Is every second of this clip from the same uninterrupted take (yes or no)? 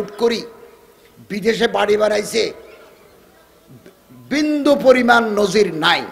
yes